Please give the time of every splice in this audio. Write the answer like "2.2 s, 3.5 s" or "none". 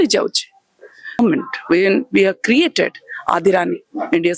1.2 s